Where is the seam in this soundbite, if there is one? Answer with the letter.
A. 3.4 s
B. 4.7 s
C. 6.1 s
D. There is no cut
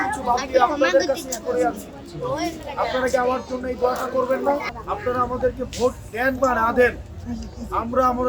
B